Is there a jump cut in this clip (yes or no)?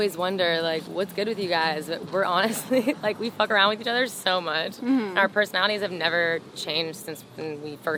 no